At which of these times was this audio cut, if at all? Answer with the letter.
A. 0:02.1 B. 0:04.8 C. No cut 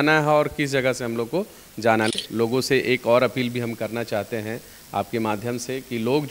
A